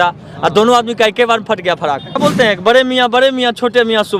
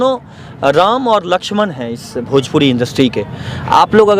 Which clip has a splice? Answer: first; 1 cut; at 2.2 s

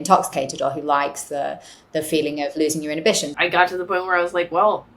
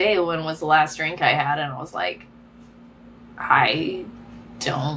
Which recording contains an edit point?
first; 1 cut; at 3.3 s

